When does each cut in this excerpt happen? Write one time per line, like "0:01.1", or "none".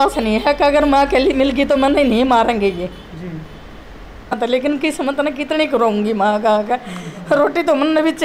0:04.3